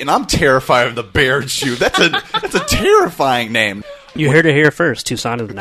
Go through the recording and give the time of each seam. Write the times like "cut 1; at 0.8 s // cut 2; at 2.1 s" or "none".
cut 1; at 4.1 s